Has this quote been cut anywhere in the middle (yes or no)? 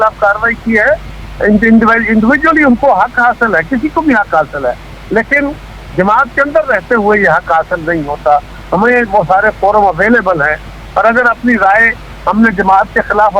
no